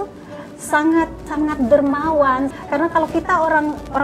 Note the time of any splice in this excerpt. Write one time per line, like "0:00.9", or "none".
0:01.2
0:02.5